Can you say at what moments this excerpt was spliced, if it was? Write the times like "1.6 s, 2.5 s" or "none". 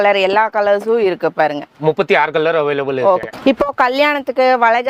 none